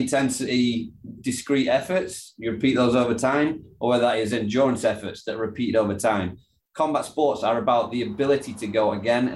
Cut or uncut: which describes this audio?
uncut